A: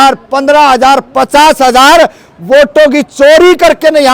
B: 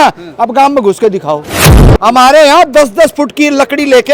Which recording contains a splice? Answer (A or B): B